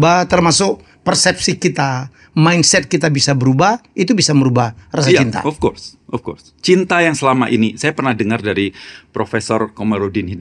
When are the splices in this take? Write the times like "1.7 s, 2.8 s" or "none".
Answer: none